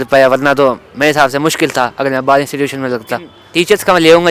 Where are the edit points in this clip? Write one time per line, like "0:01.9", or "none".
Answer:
0:03.4